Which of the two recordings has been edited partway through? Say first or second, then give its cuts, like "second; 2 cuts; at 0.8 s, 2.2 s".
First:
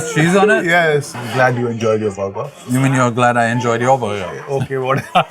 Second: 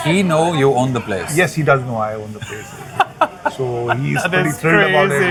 first; 2 cuts; at 1.2 s, 2.5 s